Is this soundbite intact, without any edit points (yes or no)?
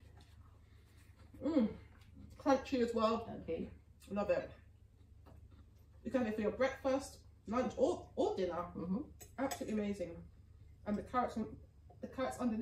yes